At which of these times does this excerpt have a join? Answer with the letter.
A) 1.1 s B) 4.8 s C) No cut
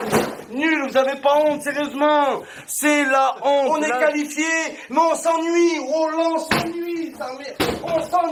C